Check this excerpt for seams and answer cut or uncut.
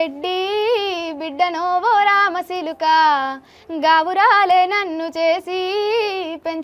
uncut